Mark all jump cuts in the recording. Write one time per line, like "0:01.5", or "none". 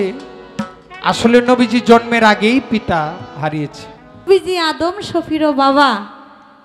0:04.3